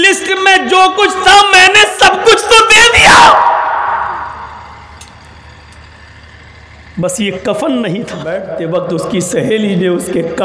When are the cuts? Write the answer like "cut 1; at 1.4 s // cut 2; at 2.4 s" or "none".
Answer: cut 1; at 8.5 s